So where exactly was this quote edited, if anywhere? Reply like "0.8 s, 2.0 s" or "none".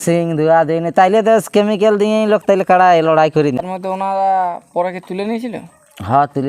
3.6 s